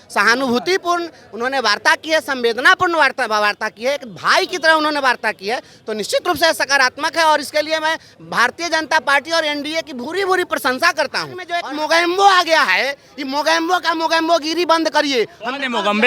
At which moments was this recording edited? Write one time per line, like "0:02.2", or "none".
0:11.5